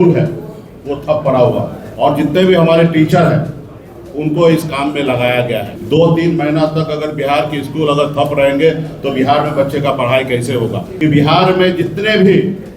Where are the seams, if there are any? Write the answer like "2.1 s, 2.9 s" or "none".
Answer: 1.8 s, 5.7 s, 10.8 s